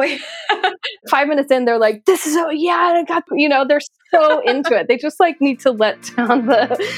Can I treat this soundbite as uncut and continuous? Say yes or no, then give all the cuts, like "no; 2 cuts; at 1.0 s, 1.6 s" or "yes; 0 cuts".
no; 1 cut; at 3.3 s